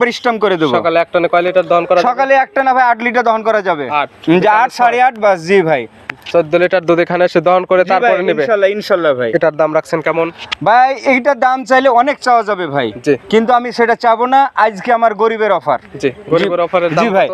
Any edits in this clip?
no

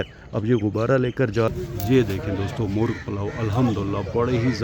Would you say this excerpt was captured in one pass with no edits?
no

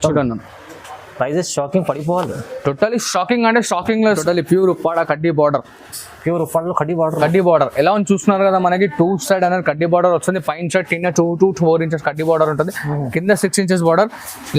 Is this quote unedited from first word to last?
no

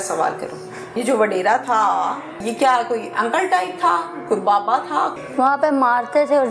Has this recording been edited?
yes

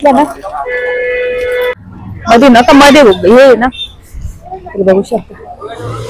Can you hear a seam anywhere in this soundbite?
yes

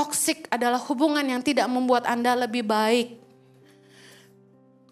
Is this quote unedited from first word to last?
yes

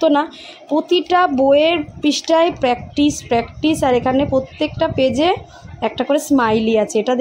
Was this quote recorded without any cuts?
yes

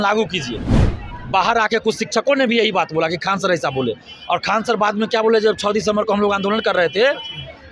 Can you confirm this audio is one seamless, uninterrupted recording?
yes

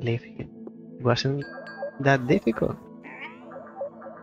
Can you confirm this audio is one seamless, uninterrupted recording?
yes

